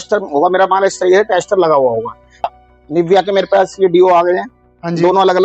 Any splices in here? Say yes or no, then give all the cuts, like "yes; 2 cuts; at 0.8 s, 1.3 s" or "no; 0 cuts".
yes; 1 cut; at 2.5 s